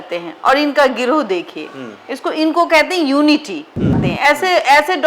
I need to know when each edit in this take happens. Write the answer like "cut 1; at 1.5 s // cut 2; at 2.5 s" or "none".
cut 1; at 4.1 s